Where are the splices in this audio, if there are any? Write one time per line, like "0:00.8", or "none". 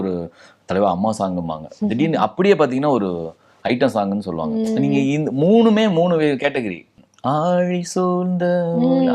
0:06.9